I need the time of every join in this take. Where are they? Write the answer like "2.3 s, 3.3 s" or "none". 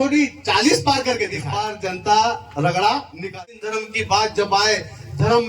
1.4 s, 3.3 s